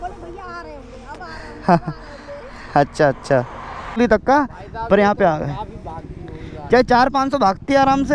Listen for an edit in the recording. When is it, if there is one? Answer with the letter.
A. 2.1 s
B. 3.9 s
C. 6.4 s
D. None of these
B